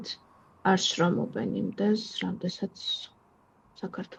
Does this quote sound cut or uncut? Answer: uncut